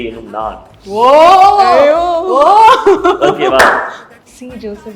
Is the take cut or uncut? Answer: uncut